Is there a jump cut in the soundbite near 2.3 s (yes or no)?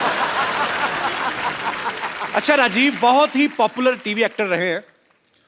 yes